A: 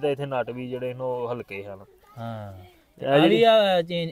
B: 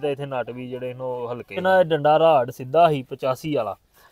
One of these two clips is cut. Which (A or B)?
B